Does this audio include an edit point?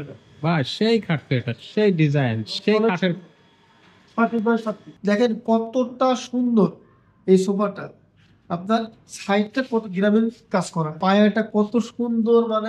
yes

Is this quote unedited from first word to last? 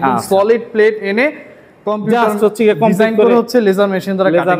yes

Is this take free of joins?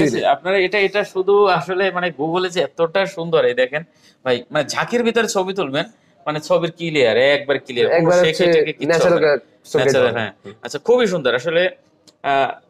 yes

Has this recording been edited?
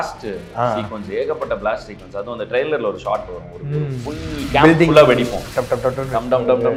no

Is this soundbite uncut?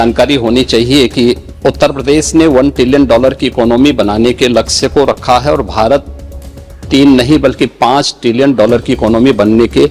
no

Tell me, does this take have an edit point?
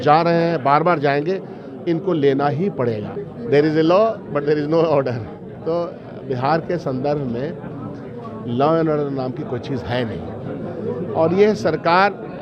yes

